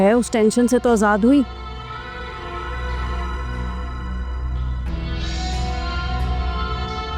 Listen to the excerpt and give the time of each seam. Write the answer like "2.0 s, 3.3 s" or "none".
none